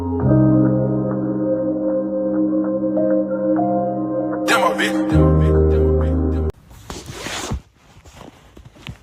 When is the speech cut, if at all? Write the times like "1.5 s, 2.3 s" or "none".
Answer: 6.5 s